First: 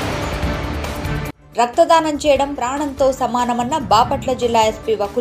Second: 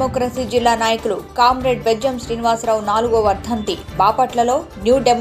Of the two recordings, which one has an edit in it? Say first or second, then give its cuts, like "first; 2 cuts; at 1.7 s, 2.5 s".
first; 1 cut; at 1.4 s